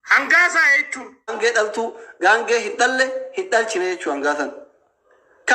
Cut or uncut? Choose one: cut